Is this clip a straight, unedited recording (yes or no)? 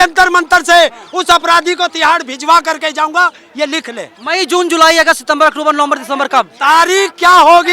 yes